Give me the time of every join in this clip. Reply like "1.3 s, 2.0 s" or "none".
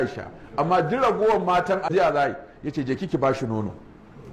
1.9 s